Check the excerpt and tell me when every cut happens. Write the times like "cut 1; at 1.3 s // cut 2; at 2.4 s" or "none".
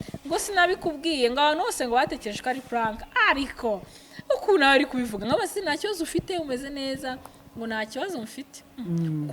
none